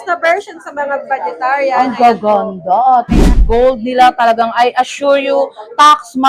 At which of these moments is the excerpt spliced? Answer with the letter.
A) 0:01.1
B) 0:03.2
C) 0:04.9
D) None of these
B